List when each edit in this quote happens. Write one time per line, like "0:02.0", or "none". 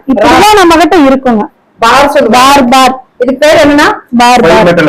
none